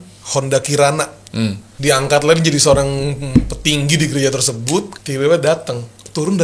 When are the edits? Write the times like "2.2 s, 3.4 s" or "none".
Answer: 1.7 s, 5.0 s